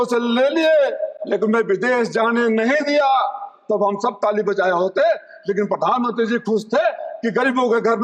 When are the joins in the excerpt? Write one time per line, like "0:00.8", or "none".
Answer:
none